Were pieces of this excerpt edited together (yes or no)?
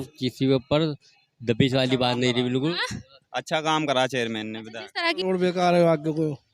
yes